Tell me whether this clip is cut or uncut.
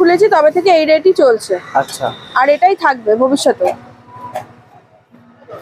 uncut